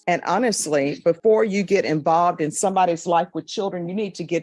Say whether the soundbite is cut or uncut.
uncut